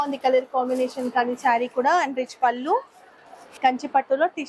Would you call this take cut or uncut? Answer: cut